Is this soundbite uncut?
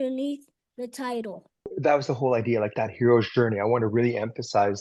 yes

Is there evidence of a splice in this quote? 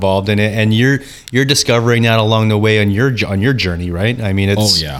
no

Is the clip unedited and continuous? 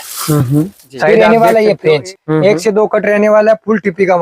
no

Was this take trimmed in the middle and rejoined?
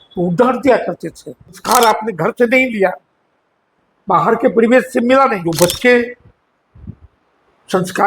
yes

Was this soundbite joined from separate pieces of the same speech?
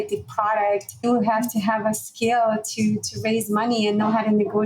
yes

